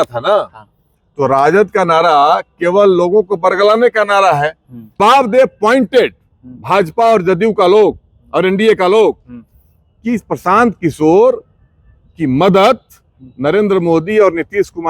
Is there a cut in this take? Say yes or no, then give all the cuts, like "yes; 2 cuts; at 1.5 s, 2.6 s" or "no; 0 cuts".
yes; 1 cut; at 5.0 s